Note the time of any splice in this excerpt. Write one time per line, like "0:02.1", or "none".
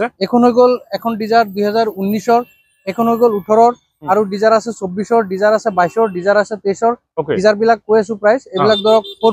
none